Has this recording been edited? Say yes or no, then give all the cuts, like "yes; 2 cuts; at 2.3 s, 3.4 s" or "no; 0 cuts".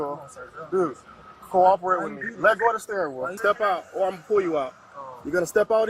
yes; 1 cut; at 3.3 s